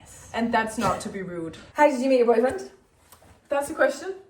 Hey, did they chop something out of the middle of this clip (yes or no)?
yes